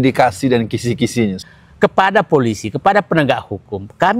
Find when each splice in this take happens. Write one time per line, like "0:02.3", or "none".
0:01.4